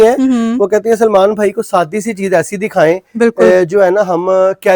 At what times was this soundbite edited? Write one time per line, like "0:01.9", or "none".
none